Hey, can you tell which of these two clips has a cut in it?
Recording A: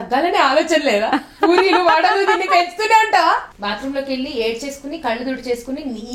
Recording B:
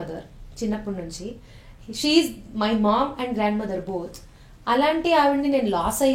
A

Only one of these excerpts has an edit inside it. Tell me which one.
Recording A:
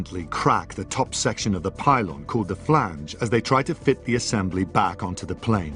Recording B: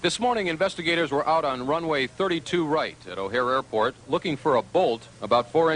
B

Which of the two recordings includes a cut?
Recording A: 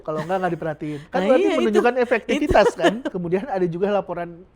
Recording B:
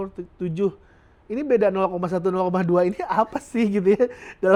A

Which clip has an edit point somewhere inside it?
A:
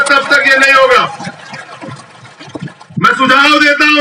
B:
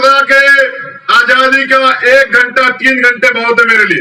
A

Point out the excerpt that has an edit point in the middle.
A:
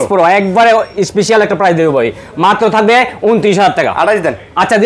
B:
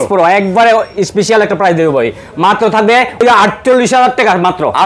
B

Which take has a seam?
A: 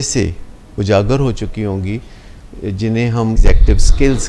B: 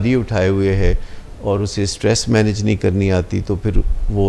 A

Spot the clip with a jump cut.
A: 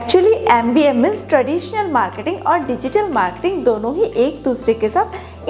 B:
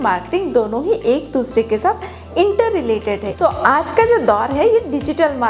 B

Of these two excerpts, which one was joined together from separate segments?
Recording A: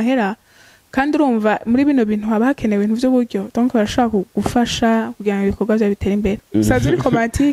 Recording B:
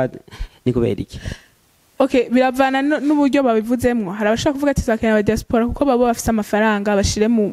A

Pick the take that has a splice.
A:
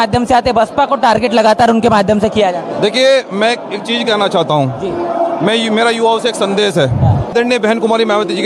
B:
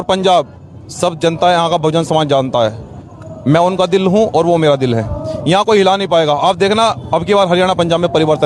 A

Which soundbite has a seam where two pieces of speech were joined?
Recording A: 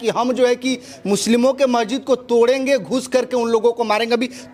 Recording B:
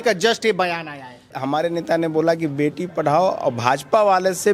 B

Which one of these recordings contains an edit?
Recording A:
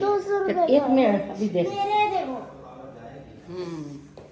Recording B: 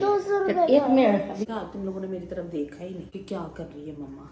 B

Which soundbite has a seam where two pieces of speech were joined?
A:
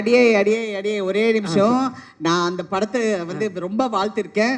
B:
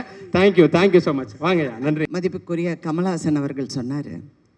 B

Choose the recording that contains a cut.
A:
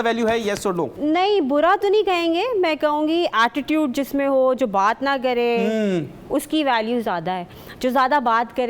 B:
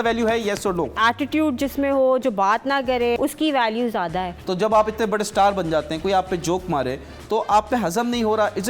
B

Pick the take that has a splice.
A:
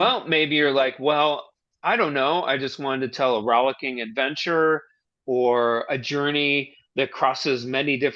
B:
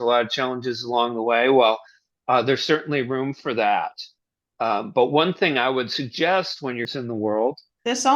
B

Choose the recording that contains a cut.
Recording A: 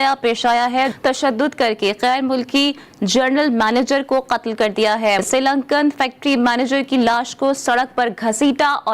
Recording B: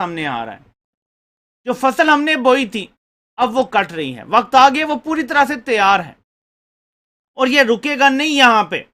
A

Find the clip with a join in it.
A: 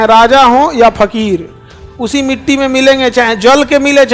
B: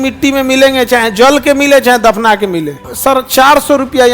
B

